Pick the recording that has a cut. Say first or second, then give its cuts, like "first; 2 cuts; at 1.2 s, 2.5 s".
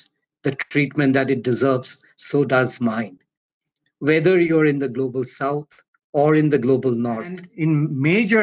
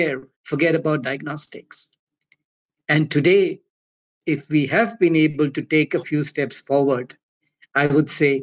first; 1 cut; at 7.4 s